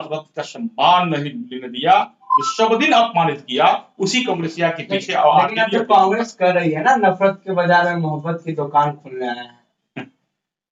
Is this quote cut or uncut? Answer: uncut